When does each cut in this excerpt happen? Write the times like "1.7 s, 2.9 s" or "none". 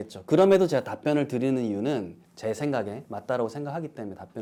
none